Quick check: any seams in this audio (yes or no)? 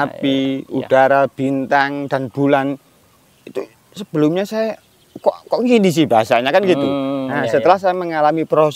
no